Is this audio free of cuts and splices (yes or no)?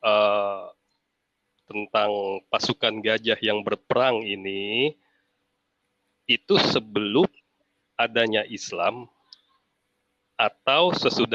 yes